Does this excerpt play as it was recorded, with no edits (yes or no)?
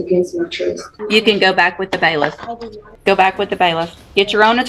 no